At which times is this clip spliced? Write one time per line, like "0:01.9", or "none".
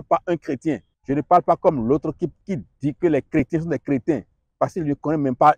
0:00.9
0:02.4